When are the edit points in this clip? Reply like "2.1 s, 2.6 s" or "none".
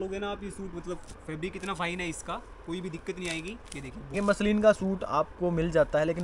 4.1 s